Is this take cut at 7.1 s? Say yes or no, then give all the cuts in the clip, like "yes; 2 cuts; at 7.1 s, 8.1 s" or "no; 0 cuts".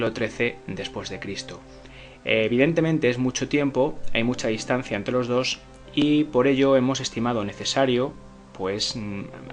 no; 0 cuts